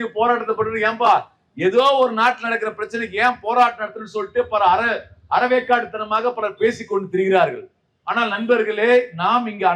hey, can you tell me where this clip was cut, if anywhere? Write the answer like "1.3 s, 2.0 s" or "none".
none